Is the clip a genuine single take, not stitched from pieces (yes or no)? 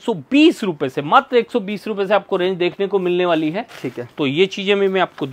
yes